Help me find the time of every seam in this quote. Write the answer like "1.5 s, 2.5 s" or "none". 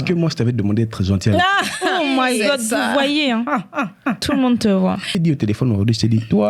5.1 s